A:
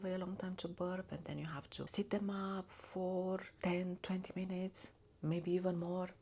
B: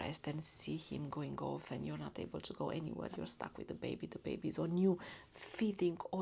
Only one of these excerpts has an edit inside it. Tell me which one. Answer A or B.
A